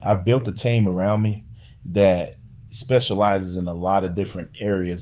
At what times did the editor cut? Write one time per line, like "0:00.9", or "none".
none